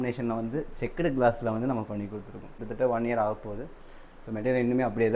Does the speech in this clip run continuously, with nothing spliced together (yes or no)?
no